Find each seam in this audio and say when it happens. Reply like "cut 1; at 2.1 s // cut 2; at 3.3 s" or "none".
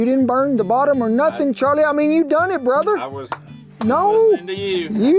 none